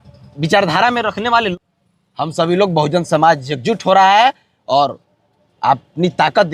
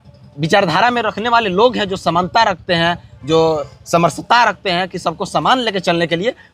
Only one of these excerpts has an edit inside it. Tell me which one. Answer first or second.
first